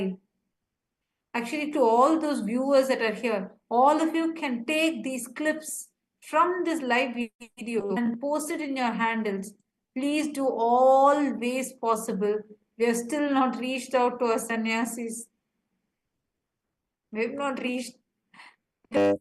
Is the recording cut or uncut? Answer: cut